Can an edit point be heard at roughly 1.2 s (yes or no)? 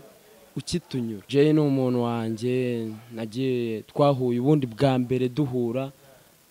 yes